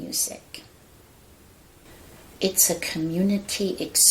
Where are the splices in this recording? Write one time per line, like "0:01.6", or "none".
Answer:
0:01.9